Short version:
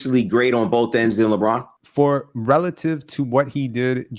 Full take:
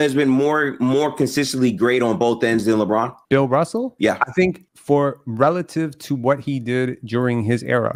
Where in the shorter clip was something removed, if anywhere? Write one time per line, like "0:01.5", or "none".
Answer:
0:01.7